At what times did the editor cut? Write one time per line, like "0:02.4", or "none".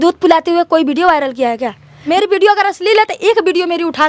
0:02.1